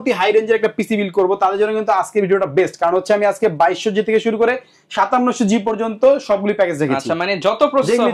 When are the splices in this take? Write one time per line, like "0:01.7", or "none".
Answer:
none